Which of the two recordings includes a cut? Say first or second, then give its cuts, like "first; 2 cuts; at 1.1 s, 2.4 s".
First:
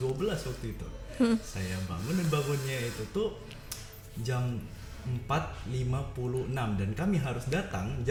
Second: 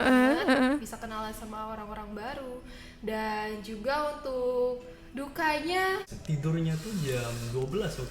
second; 1 cut; at 6.1 s